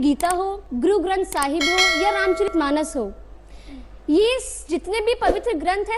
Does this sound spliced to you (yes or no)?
no